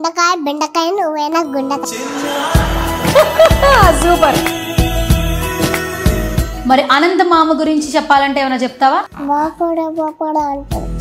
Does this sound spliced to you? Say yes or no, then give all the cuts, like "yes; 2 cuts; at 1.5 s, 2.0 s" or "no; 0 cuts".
no; 0 cuts